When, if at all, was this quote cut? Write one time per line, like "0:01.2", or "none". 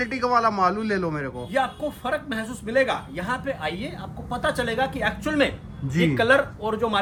none